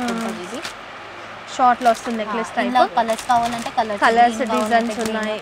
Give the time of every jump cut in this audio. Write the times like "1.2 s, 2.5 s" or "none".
none